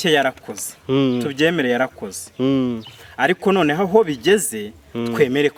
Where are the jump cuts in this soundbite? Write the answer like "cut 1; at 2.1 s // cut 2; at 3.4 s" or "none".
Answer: none